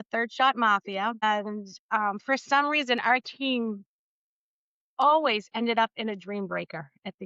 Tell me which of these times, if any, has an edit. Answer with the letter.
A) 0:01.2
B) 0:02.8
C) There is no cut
A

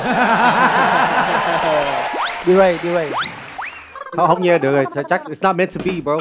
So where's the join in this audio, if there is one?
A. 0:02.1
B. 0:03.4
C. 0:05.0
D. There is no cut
A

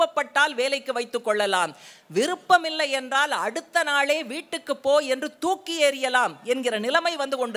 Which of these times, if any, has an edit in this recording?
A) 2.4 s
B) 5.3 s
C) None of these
C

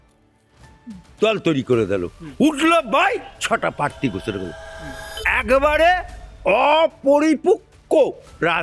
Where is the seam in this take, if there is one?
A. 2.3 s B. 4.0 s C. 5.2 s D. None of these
C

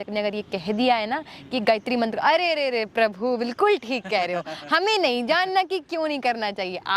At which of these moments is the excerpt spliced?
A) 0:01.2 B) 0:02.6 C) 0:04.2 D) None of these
D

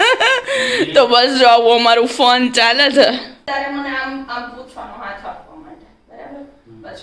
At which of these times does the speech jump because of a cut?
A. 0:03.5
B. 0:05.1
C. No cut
A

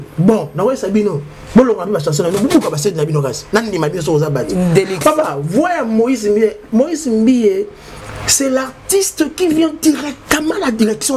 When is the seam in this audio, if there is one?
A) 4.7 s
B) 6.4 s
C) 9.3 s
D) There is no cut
D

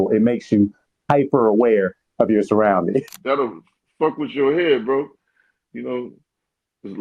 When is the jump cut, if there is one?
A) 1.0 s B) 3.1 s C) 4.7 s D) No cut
B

